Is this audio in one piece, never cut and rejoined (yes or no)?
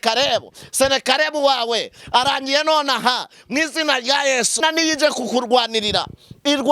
no